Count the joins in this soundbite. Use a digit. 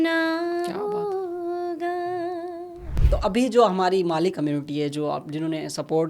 1